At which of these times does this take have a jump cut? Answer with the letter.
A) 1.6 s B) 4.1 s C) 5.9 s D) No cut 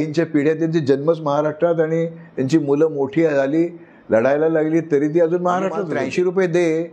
C